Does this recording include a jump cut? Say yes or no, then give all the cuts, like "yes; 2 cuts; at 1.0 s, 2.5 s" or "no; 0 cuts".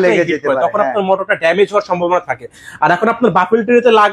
no; 0 cuts